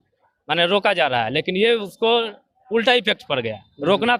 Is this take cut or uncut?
uncut